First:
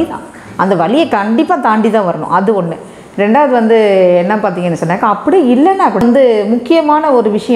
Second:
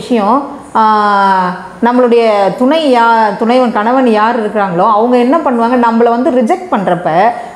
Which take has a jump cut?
first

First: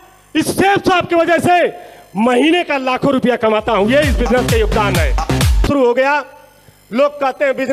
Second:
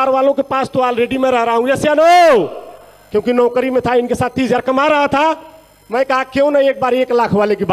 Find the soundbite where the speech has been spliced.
first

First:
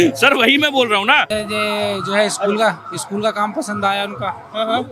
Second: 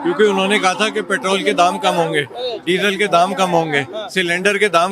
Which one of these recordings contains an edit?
first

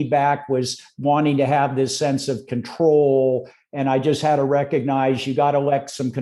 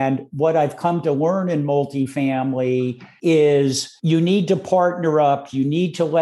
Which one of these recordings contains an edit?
second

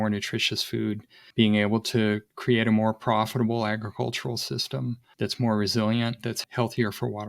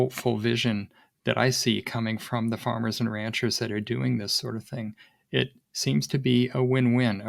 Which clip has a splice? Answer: first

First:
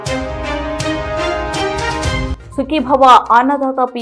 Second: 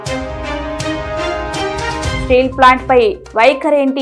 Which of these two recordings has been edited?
first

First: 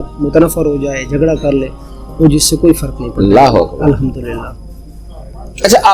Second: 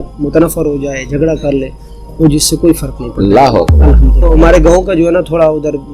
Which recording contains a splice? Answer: second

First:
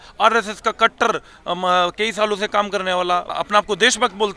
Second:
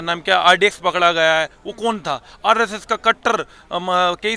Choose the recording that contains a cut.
first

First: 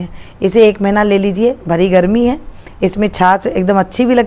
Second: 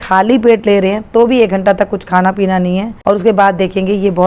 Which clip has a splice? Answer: second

